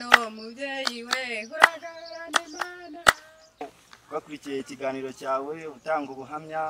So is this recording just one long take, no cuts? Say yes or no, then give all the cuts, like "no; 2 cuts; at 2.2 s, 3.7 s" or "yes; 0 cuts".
no; 1 cut; at 3.6 s